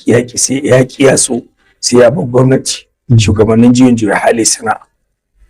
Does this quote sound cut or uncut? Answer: uncut